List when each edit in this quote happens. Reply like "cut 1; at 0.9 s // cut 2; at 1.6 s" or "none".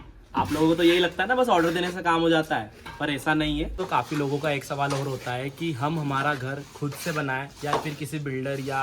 cut 1; at 3.8 s